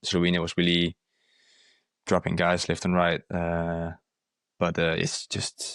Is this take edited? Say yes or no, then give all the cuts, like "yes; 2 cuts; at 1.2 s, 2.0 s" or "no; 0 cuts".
no; 0 cuts